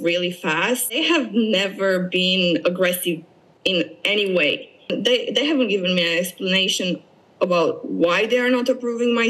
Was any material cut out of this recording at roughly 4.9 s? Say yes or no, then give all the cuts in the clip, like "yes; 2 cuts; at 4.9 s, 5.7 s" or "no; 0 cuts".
yes; 2 cuts; at 0.9 s, 4.9 s